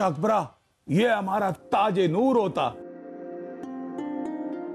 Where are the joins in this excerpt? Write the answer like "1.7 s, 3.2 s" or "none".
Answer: none